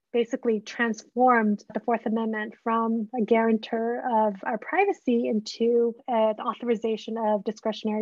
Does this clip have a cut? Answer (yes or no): no